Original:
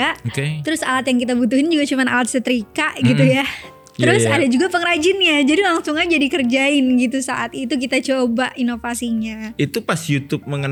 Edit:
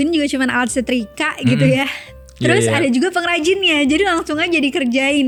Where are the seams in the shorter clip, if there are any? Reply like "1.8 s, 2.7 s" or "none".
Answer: none

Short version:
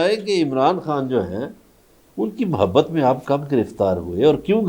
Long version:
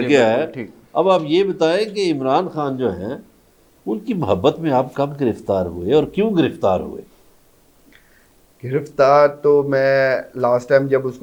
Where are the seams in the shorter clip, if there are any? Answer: none

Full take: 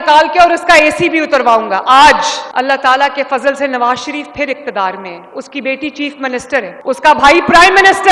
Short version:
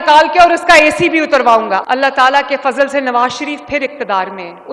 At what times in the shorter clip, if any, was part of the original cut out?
1.8 s

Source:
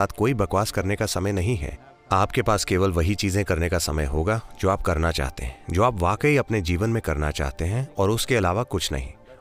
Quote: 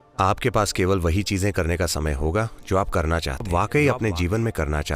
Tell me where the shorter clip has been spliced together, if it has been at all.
3.5 s

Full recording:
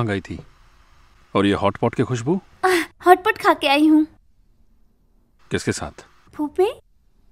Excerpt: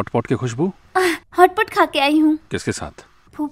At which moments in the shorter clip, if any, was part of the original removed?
2.4 s

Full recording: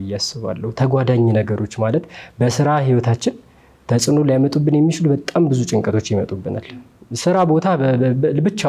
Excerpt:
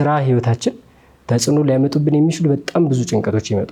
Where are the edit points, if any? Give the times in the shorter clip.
none

